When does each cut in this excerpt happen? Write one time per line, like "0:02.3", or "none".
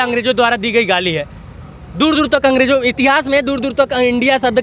none